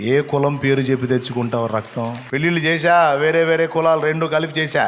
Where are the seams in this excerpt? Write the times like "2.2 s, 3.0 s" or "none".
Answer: 2.2 s